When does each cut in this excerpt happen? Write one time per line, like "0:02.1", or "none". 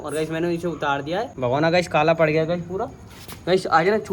0:01.3